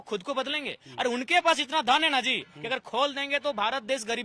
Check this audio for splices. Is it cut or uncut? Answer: uncut